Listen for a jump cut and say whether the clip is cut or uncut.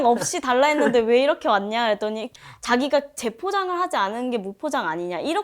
cut